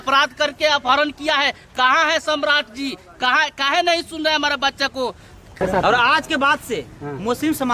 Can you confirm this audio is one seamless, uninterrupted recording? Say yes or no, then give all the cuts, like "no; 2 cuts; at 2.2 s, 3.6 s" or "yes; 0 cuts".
no; 1 cut; at 5.6 s